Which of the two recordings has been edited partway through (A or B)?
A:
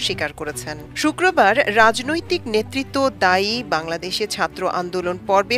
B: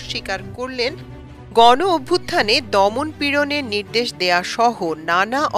B